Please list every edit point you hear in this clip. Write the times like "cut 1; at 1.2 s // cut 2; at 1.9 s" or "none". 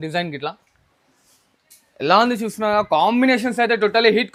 none

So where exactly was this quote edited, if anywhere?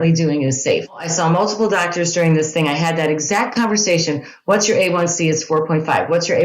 cut 1; at 1.1 s

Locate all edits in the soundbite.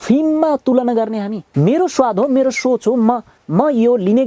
cut 1; at 1.4 s

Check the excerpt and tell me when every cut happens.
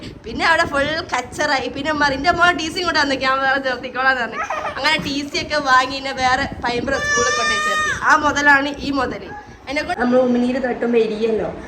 cut 1; at 9.9 s

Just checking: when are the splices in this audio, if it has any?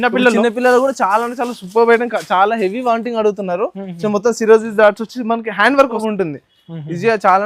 cut 1; at 6.0 s

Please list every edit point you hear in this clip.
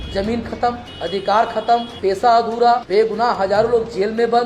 cut 1; at 0.9 s // cut 2; at 1.9 s // cut 3; at 2.8 s

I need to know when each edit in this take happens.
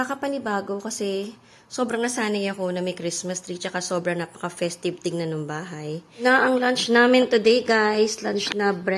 cut 1; at 6.1 s

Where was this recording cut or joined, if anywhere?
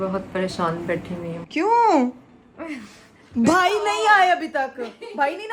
none

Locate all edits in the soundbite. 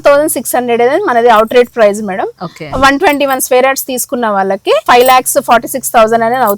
cut 1; at 4.8 s

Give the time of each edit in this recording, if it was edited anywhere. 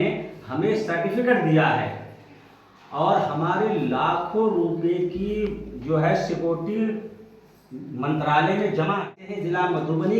cut 1; at 9.3 s

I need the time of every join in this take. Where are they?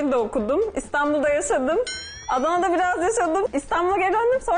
cut 1; at 3.5 s

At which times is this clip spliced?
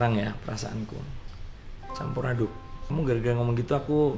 cut 1; at 1.1 s // cut 2; at 2.7 s

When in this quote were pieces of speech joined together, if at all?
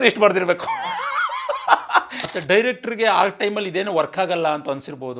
cut 1; at 2.2 s

